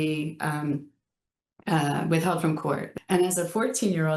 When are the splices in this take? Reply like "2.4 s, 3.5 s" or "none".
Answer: 2.9 s